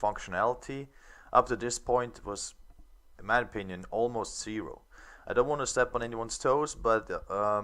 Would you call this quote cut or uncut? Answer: cut